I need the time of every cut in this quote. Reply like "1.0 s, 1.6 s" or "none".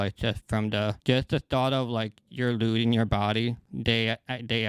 none